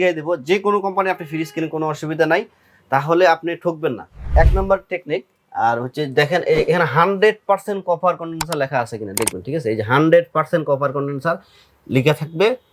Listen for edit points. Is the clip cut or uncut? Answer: uncut